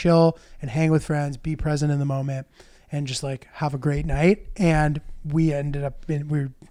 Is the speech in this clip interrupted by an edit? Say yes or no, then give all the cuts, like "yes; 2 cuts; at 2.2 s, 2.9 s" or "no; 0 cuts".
no; 0 cuts